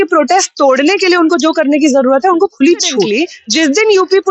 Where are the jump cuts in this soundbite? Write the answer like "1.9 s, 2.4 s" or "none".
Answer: 3.1 s